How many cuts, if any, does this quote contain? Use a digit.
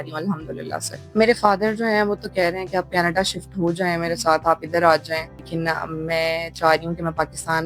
2